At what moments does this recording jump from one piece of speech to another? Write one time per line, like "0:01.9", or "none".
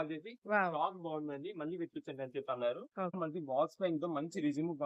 0:03.2